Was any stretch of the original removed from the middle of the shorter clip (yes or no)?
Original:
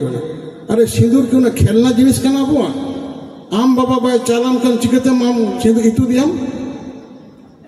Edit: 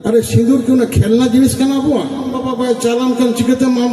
yes